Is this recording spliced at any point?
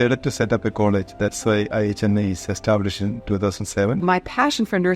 yes; 1 cut; at 4.0 s

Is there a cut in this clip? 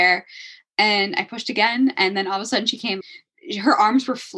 yes; 1 cut; at 3.0 s

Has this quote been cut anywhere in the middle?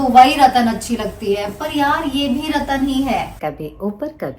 yes; 1 cut; at 3.3 s

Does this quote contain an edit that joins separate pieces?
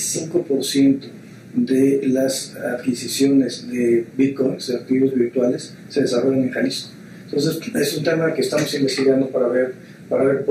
no; 0 cuts

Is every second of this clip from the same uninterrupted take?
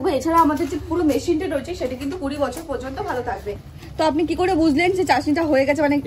no; 1 cut; at 3.7 s

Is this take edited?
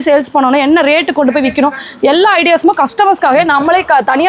no; 0 cuts

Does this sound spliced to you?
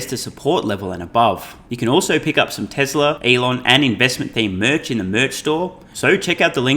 yes; 3 cuts; at 1.6 s, 3.2 s, 5.9 s

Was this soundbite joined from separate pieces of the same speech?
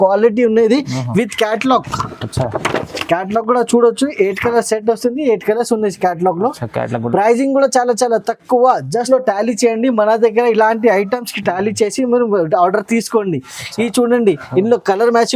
yes; 1 cut; at 9.1 s

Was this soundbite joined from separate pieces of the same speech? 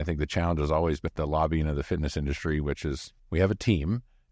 yes; 2 cuts; at 1.1 s, 3.1 s

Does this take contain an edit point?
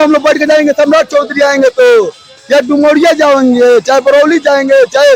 no; 0 cuts

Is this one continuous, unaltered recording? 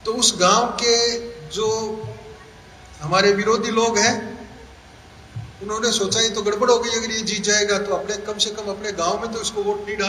yes; 0 cuts

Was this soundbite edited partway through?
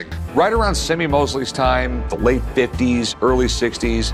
no; 0 cuts

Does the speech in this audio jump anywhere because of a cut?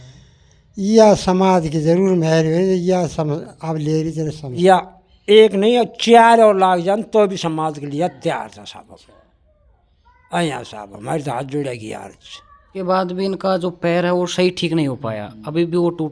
yes; 2 cuts; at 4.6 s, 12.7 s

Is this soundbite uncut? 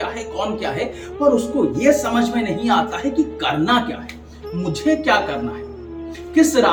yes; 0 cuts

